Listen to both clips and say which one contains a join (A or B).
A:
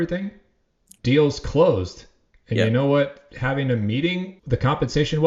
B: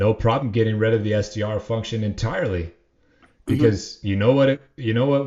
A